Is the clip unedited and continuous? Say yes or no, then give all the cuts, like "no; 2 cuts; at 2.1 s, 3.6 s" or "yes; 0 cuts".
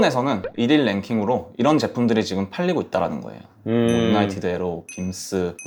yes; 0 cuts